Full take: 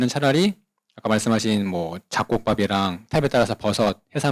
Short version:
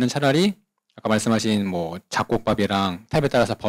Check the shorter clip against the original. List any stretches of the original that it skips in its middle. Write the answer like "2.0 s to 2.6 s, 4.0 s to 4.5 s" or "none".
none